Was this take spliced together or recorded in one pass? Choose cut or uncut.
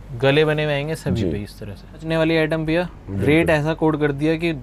cut